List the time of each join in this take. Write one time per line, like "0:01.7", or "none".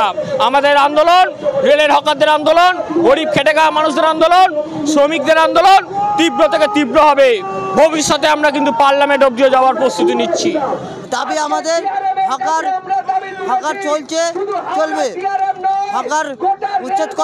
none

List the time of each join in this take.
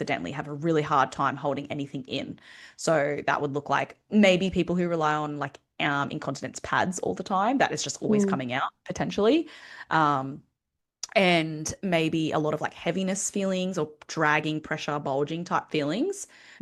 none

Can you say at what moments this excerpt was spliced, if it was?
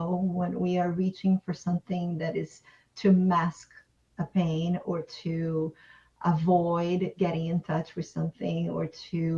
none

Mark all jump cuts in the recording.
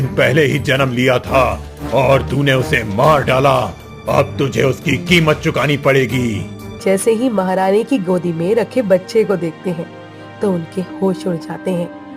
0:06.8

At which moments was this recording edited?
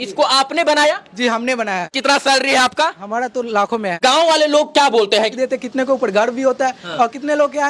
0:01.9
0:04.0
0:05.3

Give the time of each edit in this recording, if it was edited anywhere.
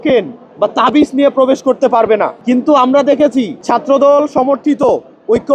0:02.3
0:03.6

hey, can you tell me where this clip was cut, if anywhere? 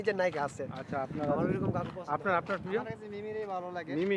none

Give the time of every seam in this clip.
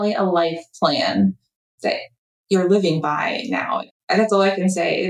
0:03.9

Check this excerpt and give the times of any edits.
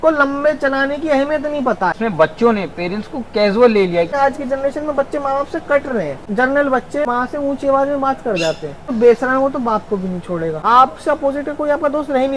0:02.0
0:04.1
0:06.2
0:07.1
0:08.9
0:10.6

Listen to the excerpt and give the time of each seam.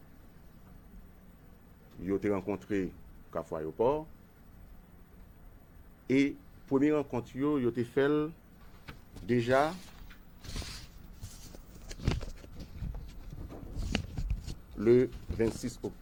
none

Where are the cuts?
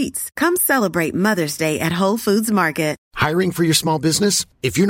0:03.1

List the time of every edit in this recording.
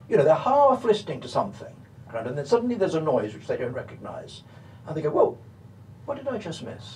0:02.1

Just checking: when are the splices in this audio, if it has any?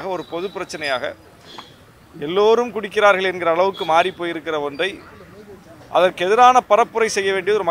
none

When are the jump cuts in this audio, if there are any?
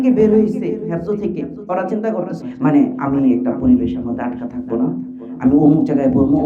0:02.4

